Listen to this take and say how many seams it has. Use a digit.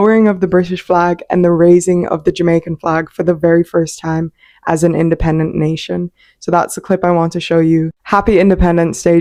0